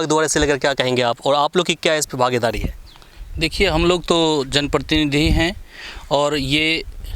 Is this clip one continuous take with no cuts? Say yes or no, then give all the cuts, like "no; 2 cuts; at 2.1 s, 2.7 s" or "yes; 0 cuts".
yes; 0 cuts